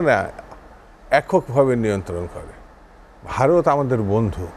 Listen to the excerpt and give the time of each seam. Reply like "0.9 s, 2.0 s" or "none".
none